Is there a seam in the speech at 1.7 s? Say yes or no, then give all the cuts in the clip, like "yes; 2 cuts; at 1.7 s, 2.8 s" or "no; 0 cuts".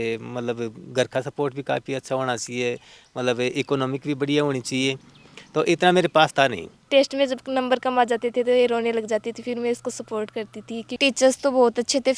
no; 2 cuts; at 6.7 s, 10.9 s